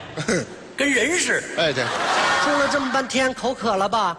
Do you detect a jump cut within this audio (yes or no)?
yes